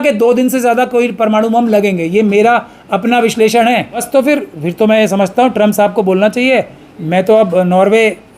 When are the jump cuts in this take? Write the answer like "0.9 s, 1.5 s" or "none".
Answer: 4.0 s